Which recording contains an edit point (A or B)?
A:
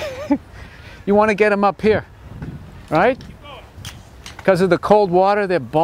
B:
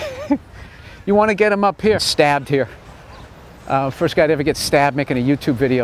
A